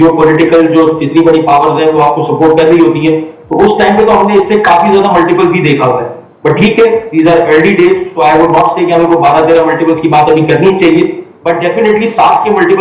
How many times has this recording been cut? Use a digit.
0